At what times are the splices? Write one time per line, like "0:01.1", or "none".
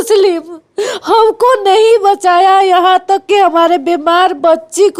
none